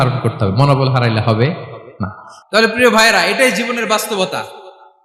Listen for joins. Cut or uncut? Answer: cut